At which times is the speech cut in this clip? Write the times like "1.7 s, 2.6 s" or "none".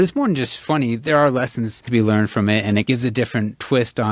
1.9 s, 2.8 s